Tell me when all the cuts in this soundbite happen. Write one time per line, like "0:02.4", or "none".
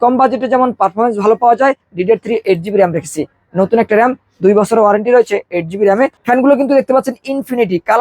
0:01.9
0:06.2